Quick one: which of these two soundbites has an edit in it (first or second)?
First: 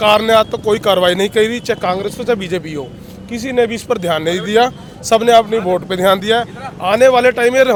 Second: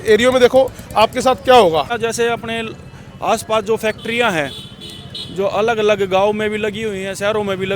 second